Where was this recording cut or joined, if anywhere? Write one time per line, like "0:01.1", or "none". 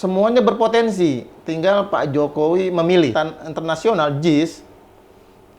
0:03.1